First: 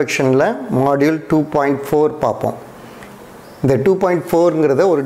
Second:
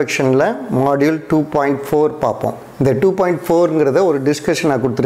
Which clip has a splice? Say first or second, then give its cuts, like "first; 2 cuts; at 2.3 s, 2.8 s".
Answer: second; 1 cut; at 2.6 s